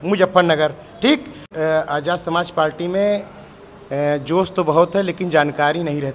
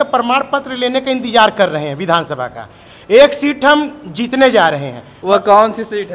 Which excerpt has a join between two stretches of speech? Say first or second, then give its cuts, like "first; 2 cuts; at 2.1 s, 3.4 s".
first; 1 cut; at 1.5 s